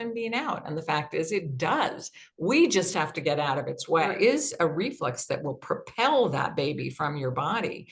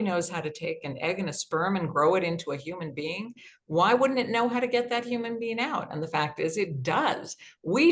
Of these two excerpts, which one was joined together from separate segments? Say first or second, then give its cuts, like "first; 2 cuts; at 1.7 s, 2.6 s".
first; 1 cut; at 4.1 s